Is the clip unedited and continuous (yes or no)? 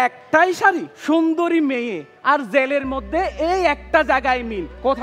no